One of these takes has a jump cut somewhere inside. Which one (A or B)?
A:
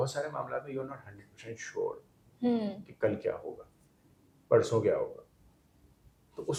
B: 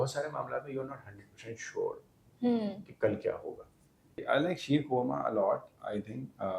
B